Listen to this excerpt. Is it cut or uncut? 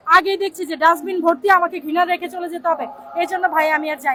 uncut